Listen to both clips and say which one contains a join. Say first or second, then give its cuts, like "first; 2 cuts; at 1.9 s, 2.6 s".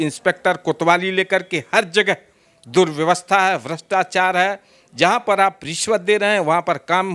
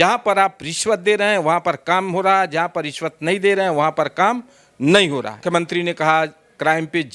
second; 1 cut; at 5.4 s